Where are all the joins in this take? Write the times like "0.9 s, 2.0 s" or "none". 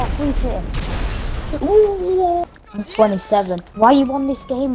2.5 s, 3.6 s